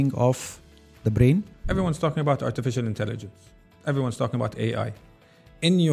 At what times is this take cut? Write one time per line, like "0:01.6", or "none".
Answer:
0:01.6